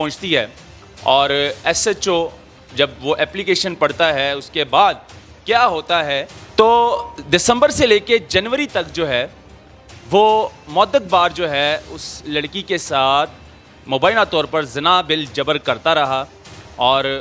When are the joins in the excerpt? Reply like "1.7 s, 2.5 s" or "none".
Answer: 6.4 s